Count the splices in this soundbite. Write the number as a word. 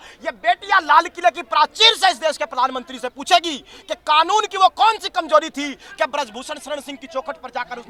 zero